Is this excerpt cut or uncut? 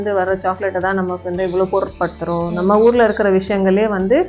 uncut